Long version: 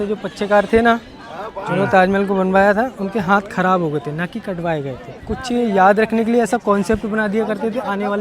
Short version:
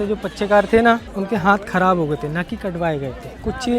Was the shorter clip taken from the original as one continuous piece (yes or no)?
no